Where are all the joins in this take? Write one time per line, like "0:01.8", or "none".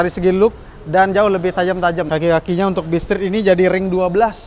0:02.1